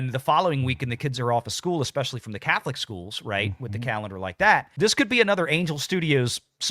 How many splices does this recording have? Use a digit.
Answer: 0